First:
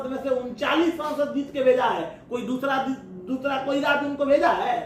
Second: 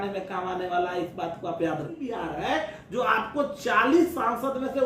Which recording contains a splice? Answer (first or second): second